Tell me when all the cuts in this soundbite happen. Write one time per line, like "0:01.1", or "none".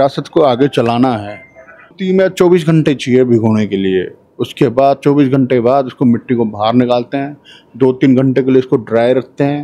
0:01.9